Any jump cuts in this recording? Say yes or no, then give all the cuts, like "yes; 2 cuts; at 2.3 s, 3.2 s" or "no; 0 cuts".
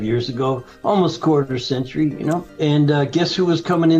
yes; 1 cut; at 2.5 s